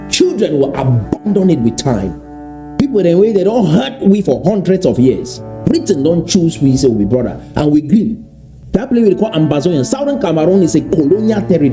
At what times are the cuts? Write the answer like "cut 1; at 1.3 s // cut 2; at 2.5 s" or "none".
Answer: cut 1; at 2.6 s // cut 2; at 8.5 s

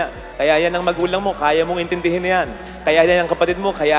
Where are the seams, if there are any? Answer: none

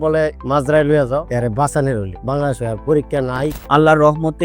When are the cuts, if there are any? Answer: cut 1; at 1.3 s // cut 2; at 3.6 s

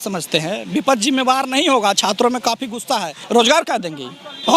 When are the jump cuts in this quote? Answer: cut 1; at 3.1 s

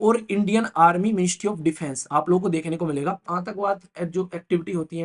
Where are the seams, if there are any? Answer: cut 1; at 3.3 s

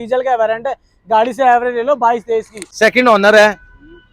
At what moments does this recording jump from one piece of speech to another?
cut 1; at 2.6 s

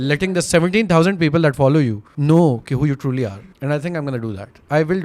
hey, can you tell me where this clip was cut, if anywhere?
cut 1; at 2.1 s // cut 2; at 3.3 s

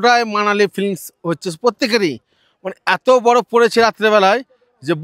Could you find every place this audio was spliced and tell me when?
none

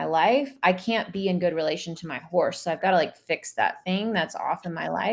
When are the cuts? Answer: none

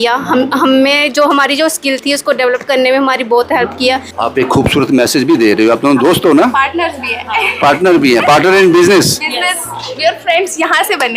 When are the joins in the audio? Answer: cut 1; at 4.1 s

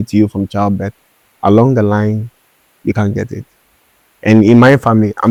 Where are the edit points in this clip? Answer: none

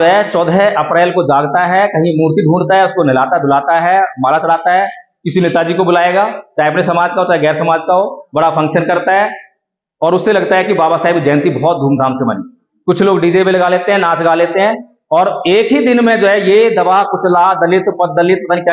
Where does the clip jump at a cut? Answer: none

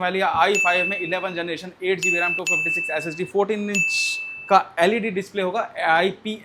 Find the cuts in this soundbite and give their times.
none

